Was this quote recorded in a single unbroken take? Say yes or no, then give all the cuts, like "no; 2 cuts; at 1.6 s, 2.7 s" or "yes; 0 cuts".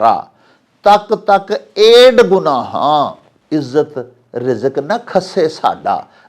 no; 1 cut; at 3.3 s